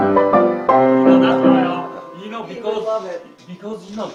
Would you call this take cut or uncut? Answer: uncut